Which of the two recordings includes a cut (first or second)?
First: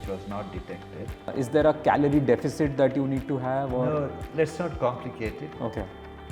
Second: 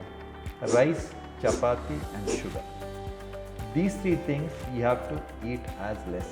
first